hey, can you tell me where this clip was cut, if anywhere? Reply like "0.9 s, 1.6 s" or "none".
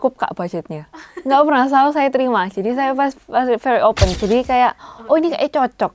4.1 s